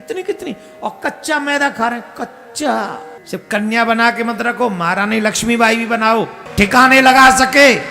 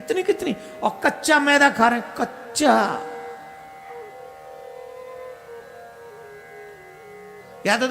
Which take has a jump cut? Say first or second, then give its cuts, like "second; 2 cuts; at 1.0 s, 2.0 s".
first; 2 cuts; at 3.1 s, 6.4 s